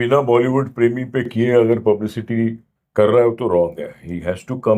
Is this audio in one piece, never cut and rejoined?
yes; 0 cuts

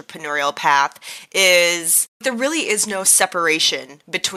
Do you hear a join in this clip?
yes; 1 cut; at 2.2 s

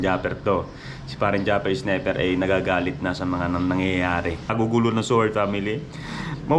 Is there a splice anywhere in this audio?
yes; 1 cut; at 4.5 s

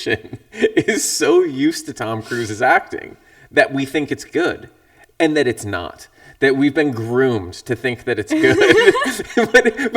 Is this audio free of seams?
yes; 0 cuts

